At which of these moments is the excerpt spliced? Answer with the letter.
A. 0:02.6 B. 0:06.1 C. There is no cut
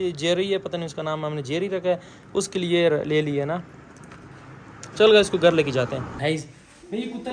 C